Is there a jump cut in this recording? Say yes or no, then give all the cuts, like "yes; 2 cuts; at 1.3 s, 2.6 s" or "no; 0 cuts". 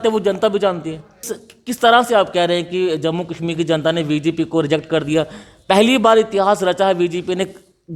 yes; 1 cut; at 1.4 s